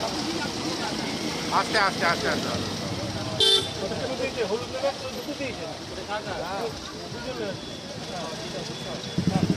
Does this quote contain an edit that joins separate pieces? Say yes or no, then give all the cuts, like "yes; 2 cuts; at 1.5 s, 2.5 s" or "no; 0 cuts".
no; 0 cuts